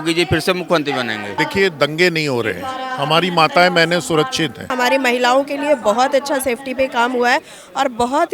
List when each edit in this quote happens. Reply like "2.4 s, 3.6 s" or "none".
1.3 s, 4.7 s